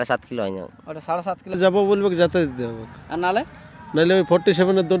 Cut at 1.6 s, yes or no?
yes